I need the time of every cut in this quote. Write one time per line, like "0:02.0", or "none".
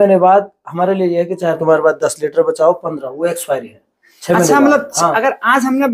none